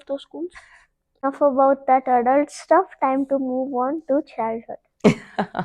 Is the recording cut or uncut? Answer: cut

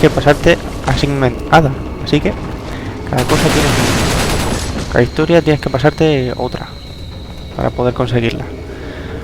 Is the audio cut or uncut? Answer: uncut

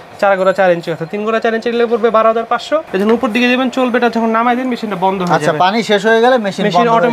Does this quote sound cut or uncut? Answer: cut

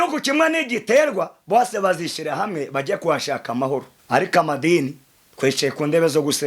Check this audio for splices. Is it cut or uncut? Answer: cut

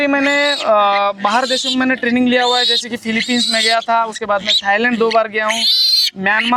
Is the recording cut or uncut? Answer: uncut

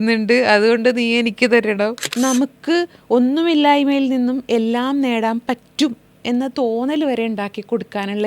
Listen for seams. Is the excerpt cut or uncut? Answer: cut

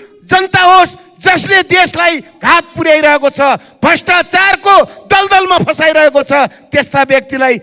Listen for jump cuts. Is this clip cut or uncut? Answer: uncut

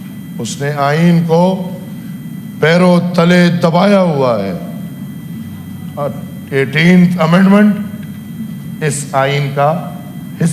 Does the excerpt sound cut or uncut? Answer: uncut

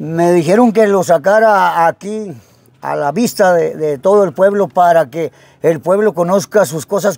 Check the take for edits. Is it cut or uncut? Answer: uncut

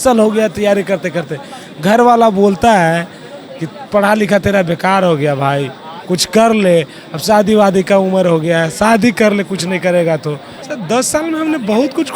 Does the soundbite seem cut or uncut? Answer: cut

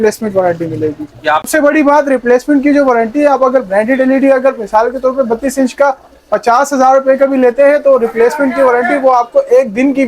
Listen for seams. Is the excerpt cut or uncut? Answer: cut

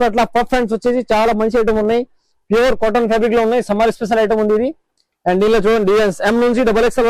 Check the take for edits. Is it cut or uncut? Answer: uncut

